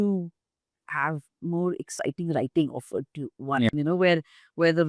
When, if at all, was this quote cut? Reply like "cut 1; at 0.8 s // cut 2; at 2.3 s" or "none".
none